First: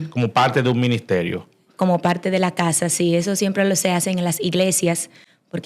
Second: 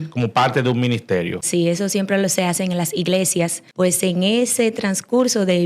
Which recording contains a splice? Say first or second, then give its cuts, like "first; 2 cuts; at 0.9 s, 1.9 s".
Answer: second; 2 cuts; at 1.5 s, 3.6 s